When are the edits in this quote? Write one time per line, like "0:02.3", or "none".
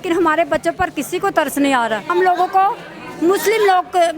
0:02.1